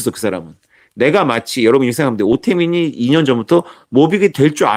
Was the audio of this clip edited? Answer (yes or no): no